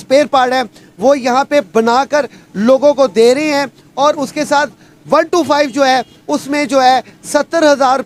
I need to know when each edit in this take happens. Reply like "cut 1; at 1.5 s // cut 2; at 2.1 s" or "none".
none